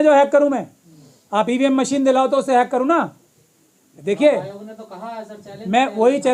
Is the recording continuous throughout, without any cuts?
yes; 0 cuts

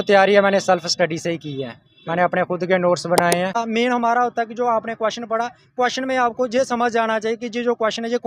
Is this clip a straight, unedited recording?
no; 1 cut; at 3.6 s

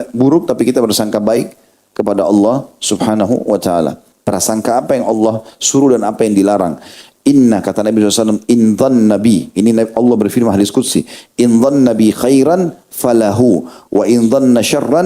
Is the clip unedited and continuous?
no; 1 cut; at 4.1 s

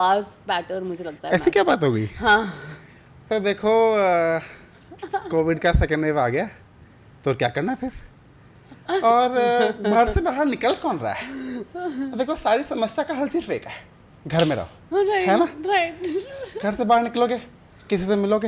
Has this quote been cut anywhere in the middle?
no; 0 cuts

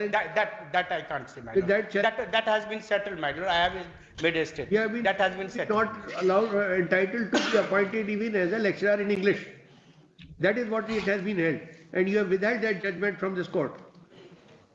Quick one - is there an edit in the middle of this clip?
no; 0 cuts

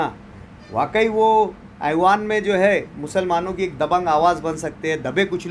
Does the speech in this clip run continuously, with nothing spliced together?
yes; 0 cuts

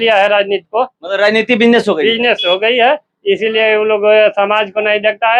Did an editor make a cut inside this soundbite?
no; 0 cuts

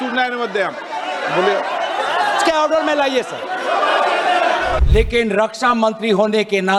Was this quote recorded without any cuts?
no; 1 cut; at 4.8 s

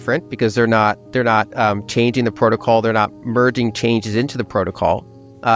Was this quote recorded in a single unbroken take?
yes; 0 cuts

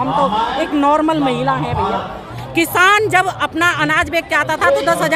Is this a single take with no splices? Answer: no; 1 cut; at 2.4 s

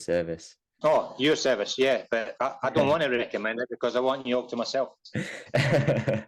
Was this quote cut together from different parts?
no; 0 cuts

